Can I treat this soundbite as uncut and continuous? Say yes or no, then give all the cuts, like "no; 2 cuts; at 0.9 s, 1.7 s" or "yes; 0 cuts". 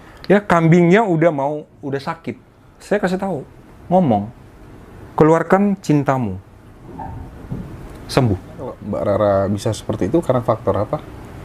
no; 1 cut; at 8.8 s